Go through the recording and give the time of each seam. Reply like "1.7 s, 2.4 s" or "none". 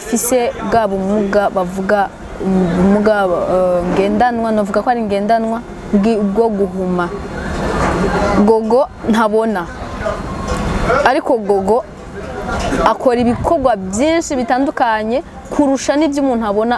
none